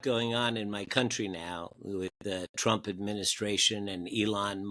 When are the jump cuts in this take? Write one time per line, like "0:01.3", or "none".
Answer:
none